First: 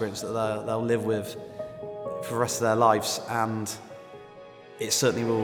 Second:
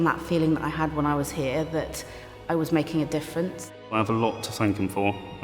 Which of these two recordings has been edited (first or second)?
second